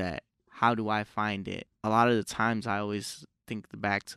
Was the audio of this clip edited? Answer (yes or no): yes